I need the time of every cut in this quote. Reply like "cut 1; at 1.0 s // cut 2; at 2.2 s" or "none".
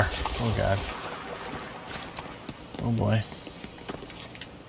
cut 1; at 3.2 s

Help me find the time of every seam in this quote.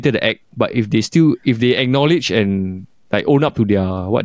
none

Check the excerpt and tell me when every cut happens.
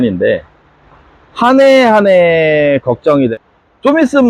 cut 1; at 3.3 s

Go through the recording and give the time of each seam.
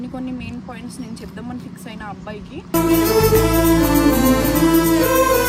none

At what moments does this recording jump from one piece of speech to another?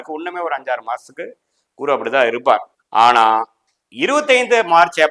none

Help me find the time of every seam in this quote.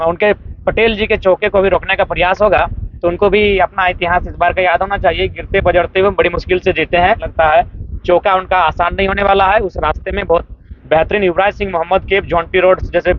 cut 1; at 2.9 s // cut 2; at 7.3 s

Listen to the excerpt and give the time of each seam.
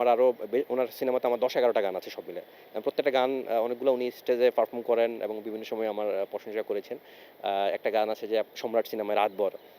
none

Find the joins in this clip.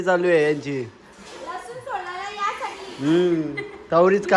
none

